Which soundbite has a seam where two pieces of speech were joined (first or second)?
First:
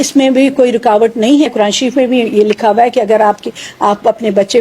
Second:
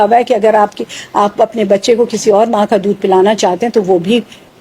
first